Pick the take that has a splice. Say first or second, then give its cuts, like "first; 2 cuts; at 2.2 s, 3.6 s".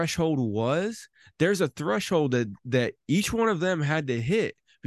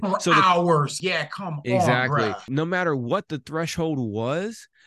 second; 2 cuts; at 1.0 s, 2.5 s